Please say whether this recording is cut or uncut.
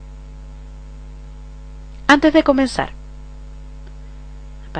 cut